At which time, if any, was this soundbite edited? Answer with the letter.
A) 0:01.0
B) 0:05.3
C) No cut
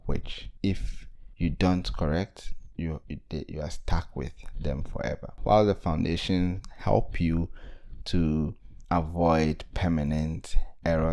B